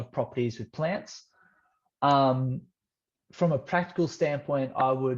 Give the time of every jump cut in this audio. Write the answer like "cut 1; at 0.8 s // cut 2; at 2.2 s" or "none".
none